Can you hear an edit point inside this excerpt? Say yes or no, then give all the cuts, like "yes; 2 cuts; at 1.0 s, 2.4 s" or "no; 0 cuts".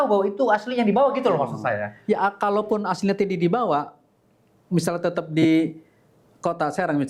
no; 0 cuts